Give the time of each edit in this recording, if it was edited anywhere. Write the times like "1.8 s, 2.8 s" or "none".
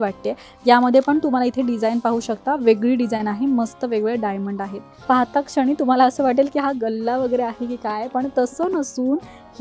4.9 s